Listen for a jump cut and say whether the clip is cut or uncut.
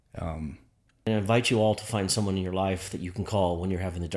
cut